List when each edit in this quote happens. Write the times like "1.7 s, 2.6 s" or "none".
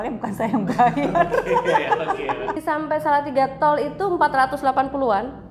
2.6 s

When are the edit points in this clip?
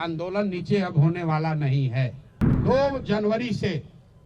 2.5 s

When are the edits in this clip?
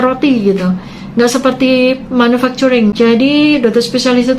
2.9 s

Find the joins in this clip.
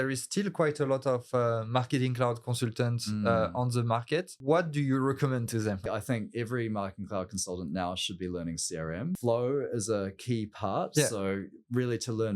4.3 s, 5.8 s, 9.2 s

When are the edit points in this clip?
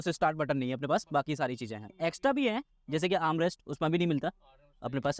1.8 s

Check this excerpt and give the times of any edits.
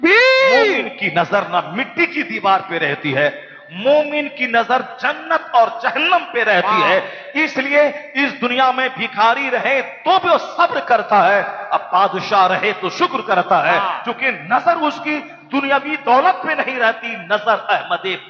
0.9 s

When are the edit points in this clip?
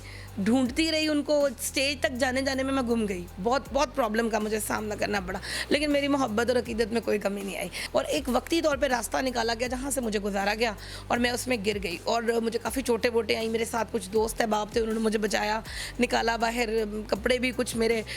7.8 s

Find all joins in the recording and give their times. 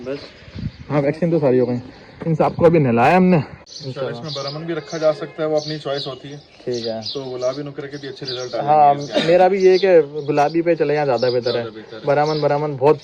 3.6 s

